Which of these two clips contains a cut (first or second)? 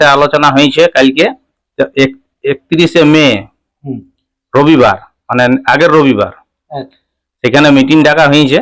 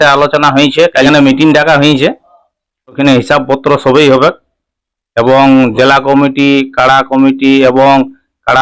second